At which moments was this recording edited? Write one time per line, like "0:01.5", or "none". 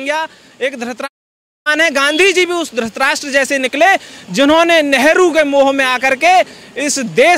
none